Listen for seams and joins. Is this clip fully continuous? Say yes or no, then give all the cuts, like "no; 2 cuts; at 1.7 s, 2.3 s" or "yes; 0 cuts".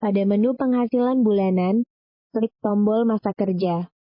yes; 0 cuts